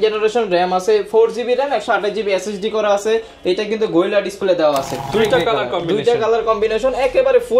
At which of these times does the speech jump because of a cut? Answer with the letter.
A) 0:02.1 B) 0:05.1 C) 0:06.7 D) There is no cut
B